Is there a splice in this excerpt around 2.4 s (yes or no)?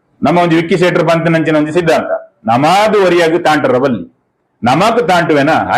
no